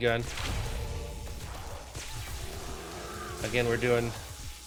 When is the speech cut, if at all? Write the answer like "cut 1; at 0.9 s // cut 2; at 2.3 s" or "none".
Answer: none